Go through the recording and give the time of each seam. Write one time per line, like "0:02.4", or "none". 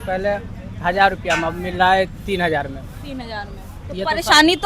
none